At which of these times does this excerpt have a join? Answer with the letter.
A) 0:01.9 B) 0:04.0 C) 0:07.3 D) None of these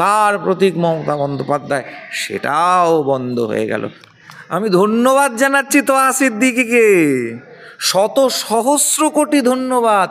B